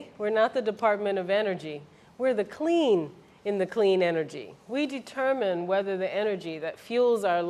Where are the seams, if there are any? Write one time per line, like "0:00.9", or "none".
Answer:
none